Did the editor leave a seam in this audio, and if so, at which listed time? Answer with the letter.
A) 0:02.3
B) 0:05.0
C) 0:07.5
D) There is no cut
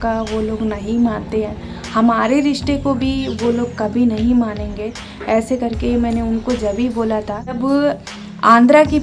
C